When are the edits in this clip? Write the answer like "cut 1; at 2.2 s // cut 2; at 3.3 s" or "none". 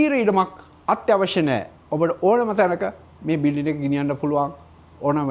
none